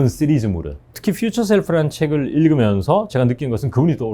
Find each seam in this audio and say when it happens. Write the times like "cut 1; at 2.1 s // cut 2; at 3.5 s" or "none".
cut 1; at 1.0 s